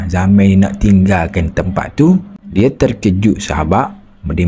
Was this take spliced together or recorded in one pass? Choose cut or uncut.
cut